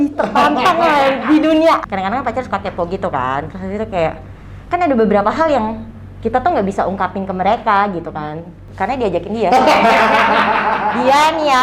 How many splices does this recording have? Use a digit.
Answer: 2